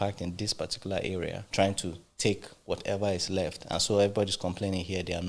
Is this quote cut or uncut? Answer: cut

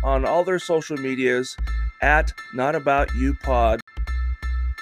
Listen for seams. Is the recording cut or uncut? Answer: cut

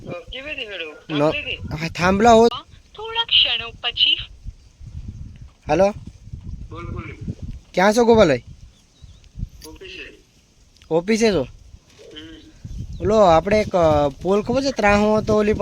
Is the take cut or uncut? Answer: cut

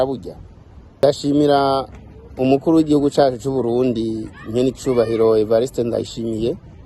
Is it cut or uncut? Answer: cut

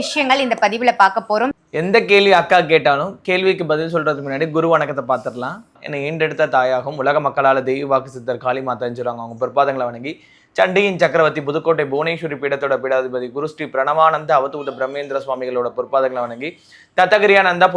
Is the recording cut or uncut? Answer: uncut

